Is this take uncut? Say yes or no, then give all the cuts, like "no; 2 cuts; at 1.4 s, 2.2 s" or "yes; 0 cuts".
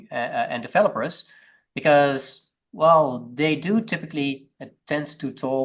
yes; 0 cuts